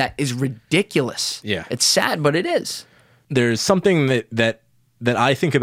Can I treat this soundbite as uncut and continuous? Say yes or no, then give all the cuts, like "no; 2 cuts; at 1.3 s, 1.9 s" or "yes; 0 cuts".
no; 1 cut; at 3.2 s